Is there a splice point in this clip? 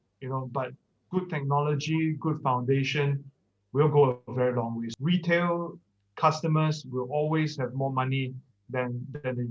yes; 1 cut; at 4.9 s

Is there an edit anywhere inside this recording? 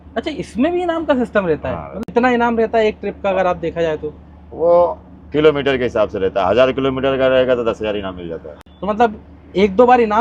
no; 0 cuts

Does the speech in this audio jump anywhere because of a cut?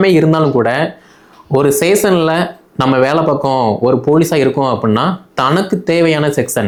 no; 0 cuts

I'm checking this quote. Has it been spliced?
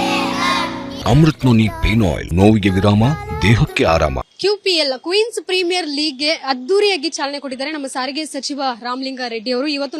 yes; 3 cuts; at 0.9 s, 2.2 s, 4.3 s

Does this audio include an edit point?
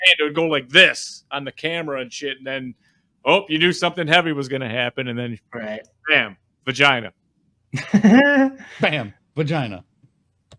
no; 0 cuts

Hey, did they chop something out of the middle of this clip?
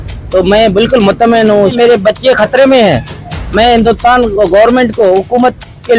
yes; 1 cut; at 1.7 s

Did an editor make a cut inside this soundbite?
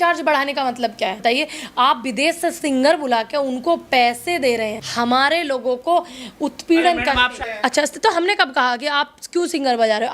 yes; 3 cuts; at 1.2 s, 4.8 s, 7.5 s

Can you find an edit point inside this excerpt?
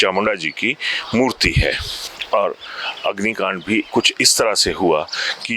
no; 0 cuts

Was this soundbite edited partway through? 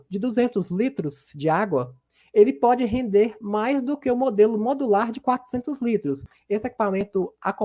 yes; 1 cut; at 6.3 s

